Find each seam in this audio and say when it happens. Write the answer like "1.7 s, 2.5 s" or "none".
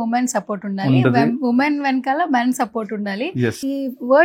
none